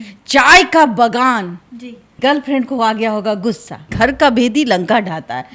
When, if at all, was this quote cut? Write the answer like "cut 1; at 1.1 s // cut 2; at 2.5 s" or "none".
cut 1; at 2.1 s // cut 2; at 3.8 s